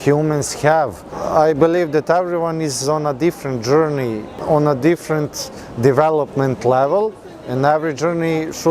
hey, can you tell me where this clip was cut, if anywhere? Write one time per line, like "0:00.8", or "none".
0:01.2
0:04.3

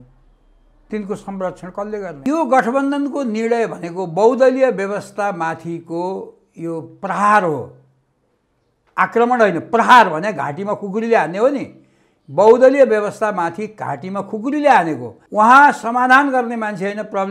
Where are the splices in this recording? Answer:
0:02.3
0:15.1

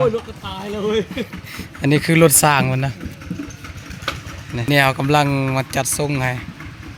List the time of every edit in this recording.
none

